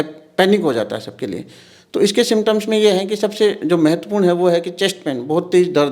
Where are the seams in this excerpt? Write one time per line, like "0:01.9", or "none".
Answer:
none